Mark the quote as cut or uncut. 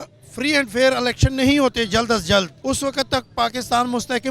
cut